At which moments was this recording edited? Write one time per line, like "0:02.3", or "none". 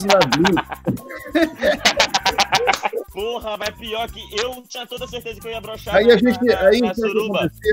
0:03.1